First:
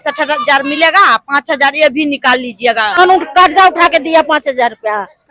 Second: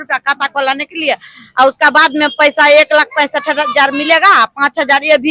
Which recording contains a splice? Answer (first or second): first